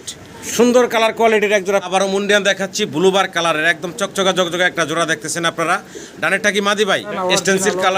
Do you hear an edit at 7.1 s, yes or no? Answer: yes